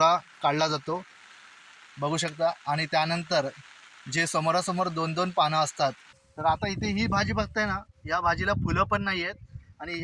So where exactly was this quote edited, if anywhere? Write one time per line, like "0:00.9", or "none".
0:06.0